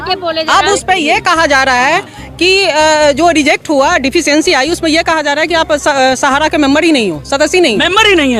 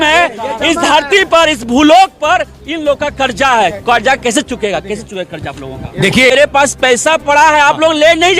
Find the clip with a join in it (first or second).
second